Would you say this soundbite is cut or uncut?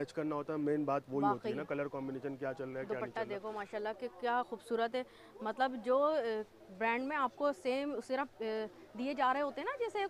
uncut